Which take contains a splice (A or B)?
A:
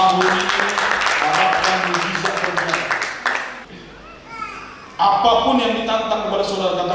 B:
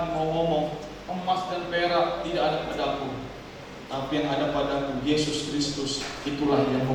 A